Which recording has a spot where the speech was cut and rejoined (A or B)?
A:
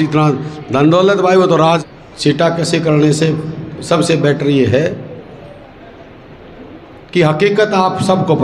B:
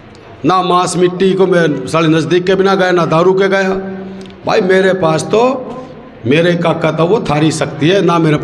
A